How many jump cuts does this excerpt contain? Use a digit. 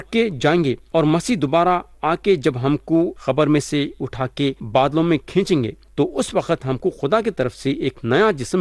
4